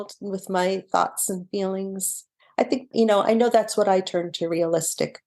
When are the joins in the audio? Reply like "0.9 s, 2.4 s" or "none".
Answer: 2.9 s